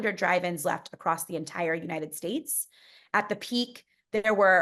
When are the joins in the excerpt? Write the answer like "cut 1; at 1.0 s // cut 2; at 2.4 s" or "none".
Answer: none